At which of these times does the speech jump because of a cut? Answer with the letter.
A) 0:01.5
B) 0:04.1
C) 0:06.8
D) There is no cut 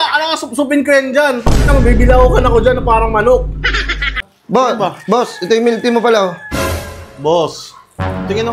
B